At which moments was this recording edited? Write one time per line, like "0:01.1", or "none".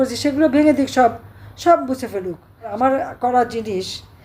0:02.7